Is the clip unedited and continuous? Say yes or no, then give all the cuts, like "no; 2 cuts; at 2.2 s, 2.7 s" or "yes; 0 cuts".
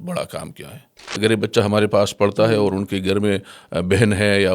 no; 1 cut; at 1.0 s